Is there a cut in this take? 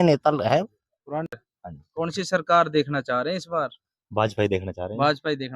yes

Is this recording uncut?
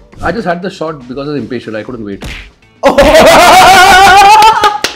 yes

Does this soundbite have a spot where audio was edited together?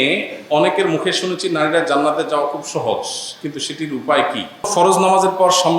yes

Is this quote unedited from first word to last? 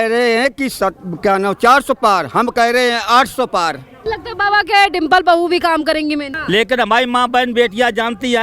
no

